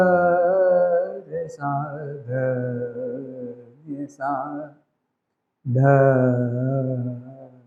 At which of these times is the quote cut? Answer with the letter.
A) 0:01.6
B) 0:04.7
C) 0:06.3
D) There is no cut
D